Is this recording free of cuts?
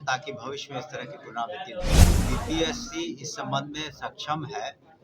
no; 1 cut; at 2.2 s

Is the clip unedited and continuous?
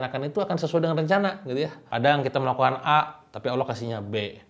no; 1 cut; at 1.8 s

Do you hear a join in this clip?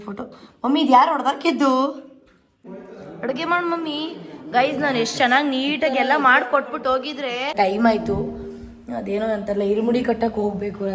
yes; 2 cuts; at 2.7 s, 7.5 s

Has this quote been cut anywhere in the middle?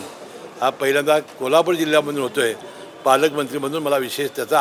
no; 0 cuts

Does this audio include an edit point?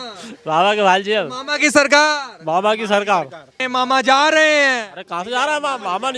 yes; 1 cut; at 3.6 s

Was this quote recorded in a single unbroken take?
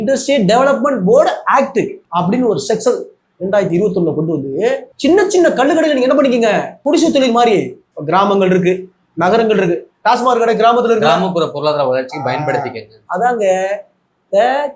no; 2 cuts; at 4.9 s, 6.7 s

